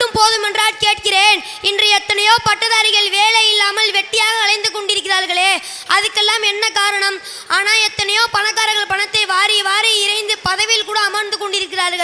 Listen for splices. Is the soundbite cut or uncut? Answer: uncut